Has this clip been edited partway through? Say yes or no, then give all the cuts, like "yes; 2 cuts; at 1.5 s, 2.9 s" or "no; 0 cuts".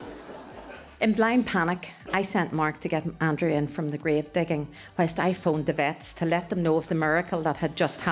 yes; 2 cuts; at 0.8 s, 3.1 s